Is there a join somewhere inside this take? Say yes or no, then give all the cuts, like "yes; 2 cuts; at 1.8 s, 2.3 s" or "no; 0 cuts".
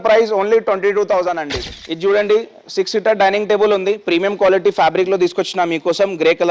yes; 1 cut; at 1.6 s